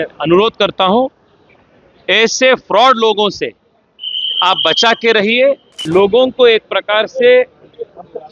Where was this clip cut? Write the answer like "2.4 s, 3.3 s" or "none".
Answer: 5.7 s